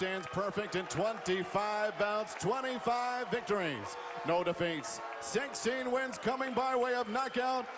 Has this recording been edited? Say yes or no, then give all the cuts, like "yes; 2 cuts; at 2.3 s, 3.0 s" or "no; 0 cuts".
yes; 1 cut; at 4.4 s